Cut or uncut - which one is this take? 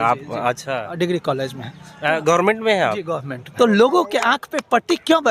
cut